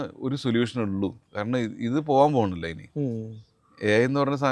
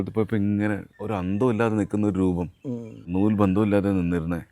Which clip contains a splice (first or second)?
second